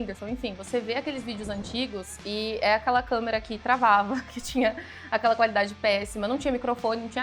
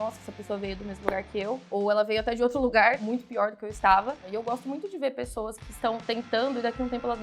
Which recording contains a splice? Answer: second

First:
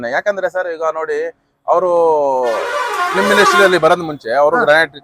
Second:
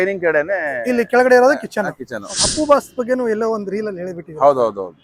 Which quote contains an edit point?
second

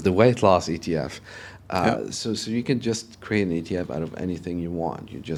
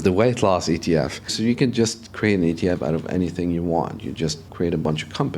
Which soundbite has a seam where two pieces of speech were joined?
second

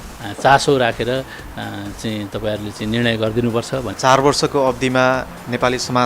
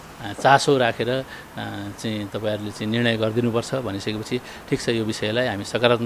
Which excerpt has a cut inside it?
first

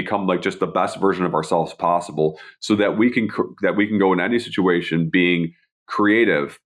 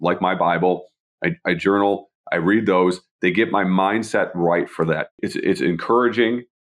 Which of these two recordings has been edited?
second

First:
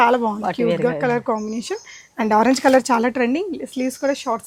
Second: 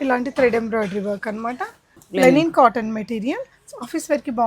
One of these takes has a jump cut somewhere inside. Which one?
second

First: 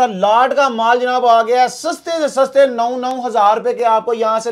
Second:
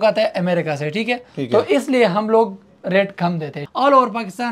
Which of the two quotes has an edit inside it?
second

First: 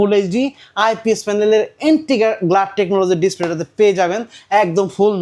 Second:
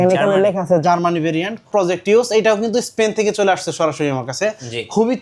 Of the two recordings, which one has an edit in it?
second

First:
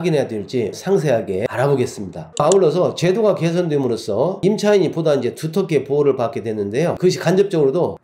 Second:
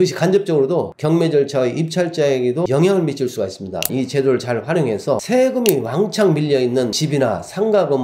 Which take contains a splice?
second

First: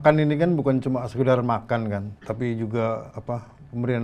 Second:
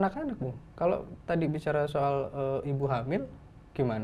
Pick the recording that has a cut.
first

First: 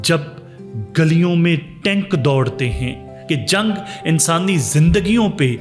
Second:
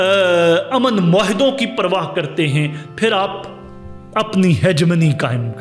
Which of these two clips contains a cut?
first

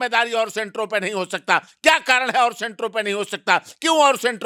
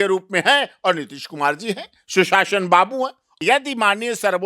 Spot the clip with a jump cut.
second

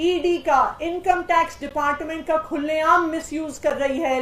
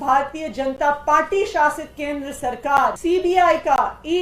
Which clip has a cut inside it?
second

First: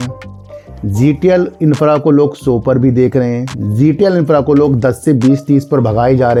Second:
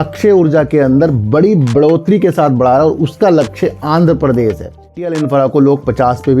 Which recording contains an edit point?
second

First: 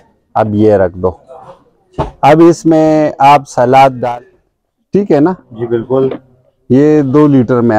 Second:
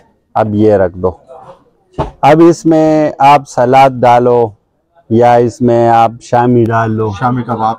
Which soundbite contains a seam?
first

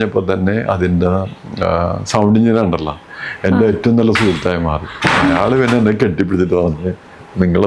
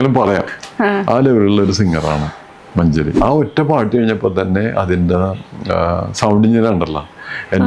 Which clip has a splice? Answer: second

